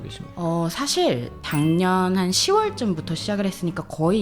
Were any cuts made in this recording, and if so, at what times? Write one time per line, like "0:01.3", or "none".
0:01.5